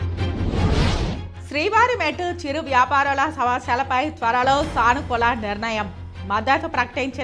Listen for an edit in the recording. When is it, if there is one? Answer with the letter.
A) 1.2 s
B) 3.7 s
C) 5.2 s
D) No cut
A